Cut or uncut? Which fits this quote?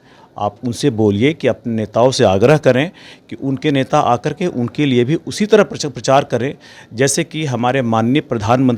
uncut